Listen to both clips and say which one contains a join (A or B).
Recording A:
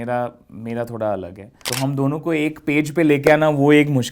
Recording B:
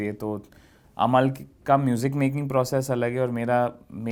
A